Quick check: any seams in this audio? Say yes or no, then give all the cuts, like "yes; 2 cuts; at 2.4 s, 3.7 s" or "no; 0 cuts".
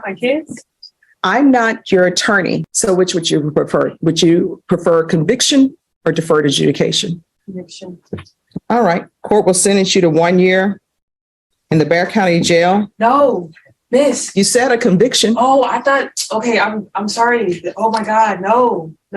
yes; 1 cut; at 2.7 s